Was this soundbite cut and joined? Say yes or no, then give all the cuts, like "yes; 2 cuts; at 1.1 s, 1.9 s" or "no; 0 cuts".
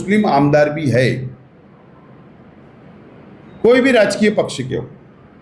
no; 0 cuts